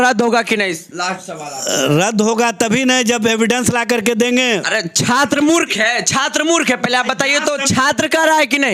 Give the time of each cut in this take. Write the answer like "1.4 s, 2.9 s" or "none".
none